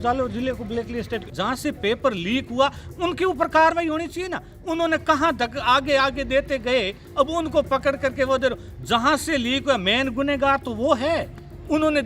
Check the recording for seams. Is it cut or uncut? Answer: cut